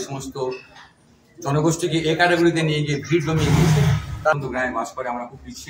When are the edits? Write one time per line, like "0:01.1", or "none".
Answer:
0:04.3